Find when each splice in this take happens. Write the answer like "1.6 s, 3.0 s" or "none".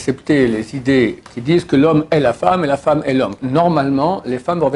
1.2 s, 3.4 s